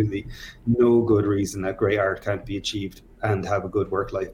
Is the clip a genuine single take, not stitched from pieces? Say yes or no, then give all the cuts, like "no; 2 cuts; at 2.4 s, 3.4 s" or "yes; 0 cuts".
yes; 0 cuts